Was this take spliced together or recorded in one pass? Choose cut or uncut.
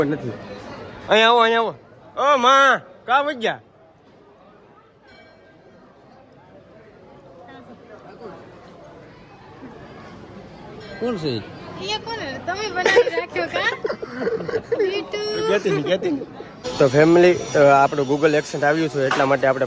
cut